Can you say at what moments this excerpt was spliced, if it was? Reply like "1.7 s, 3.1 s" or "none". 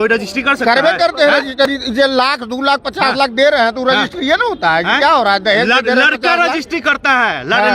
none